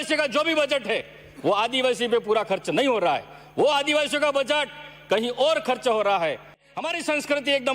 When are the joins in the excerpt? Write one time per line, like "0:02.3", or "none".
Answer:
0:06.6